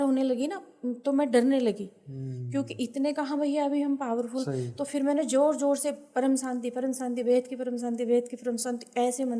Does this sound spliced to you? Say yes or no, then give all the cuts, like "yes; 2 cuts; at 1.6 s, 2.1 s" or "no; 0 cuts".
no; 0 cuts